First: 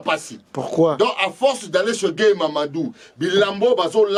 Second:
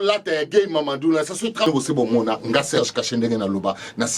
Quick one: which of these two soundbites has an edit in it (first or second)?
second